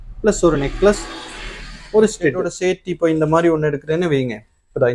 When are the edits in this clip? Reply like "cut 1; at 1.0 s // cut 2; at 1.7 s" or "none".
cut 1; at 2.5 s